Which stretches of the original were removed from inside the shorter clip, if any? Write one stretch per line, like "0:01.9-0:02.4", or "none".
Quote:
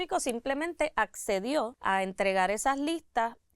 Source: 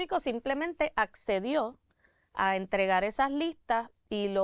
0:01.8-0:02.3